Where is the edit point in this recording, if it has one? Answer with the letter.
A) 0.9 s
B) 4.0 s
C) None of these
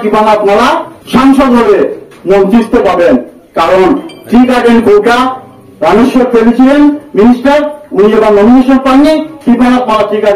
A